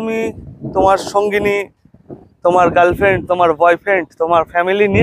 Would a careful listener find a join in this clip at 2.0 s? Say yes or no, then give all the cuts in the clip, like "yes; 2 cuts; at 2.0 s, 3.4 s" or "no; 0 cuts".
no; 0 cuts